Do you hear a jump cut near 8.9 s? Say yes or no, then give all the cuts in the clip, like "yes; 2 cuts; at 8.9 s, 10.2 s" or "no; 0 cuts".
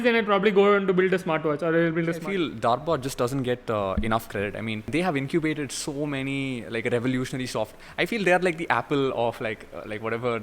no; 2 cuts; at 2.2 s, 4.9 s